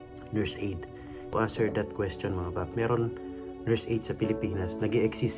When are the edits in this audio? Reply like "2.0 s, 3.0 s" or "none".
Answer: 1.3 s